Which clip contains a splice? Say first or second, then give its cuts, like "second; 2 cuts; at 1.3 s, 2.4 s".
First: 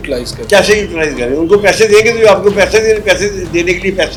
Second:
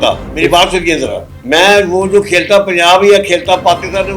second; 1 cut; at 1.3 s